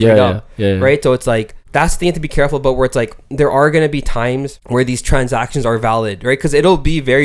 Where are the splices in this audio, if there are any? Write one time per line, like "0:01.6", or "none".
0:01.6
0:04.6